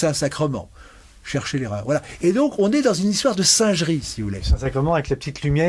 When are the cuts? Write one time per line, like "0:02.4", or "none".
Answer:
none